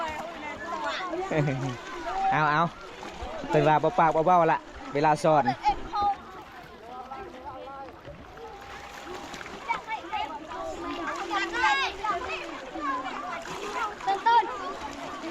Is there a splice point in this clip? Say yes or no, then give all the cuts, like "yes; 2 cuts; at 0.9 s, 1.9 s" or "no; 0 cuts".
no; 0 cuts